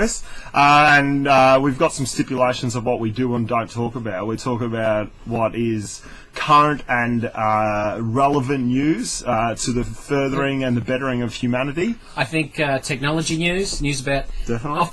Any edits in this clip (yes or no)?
yes